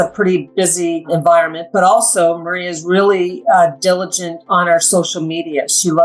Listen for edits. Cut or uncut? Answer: cut